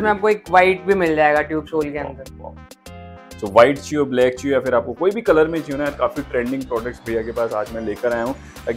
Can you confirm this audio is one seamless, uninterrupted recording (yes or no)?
yes